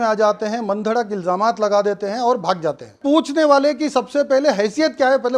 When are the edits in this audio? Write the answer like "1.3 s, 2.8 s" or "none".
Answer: 3.0 s